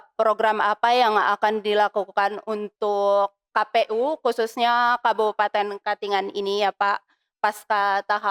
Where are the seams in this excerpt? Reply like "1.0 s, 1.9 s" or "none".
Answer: none